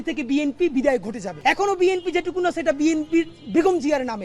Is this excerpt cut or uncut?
cut